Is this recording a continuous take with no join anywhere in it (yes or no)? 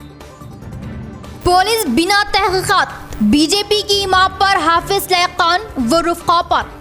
no